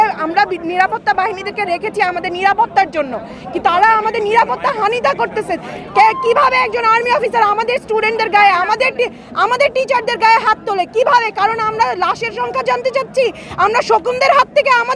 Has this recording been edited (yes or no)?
no